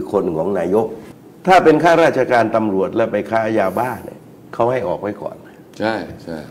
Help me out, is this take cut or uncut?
cut